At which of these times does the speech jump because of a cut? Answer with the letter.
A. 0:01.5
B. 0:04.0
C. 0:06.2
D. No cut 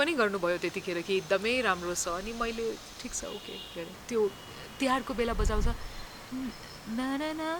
B